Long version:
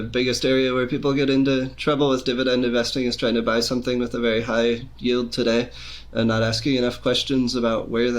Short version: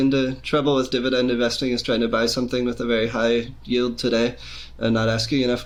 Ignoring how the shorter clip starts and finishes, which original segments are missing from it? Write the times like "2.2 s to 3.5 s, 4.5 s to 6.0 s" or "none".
none